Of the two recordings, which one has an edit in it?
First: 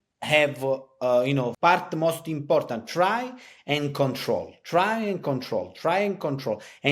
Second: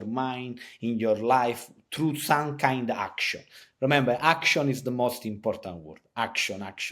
first; 1 cut; at 1.5 s

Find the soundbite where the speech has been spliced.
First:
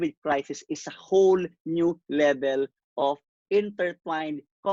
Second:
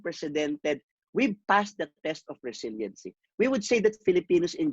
second; 1 cut; at 0.9 s

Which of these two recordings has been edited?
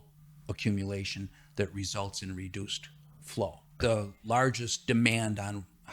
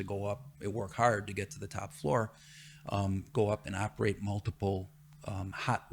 first; 1 cut; at 3.7 s

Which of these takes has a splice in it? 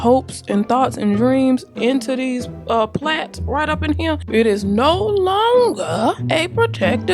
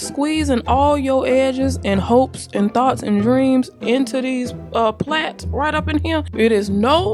first; 1 cut; at 6.2 s

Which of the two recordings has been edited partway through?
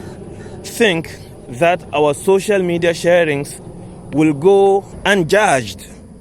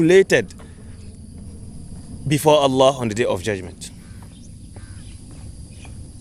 first; 1 cut; at 4.9 s

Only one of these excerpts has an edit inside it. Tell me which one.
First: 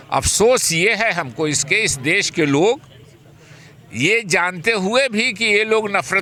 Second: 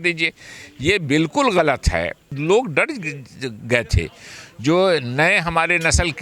second; 1 cut; at 2.3 s

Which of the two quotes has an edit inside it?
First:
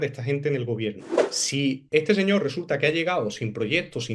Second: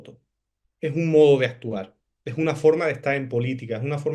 first; 1 cut; at 1.1 s

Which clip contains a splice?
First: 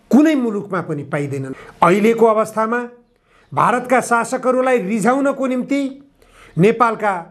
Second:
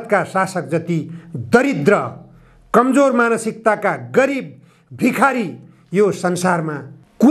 first; 1 cut; at 1.6 s

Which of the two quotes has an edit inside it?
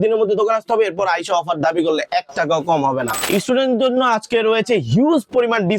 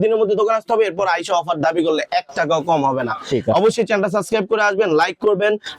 first; 1 cut; at 3.2 s

